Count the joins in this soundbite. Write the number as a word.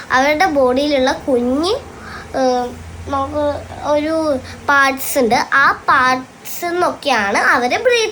zero